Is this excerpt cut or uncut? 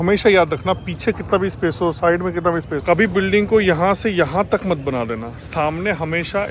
cut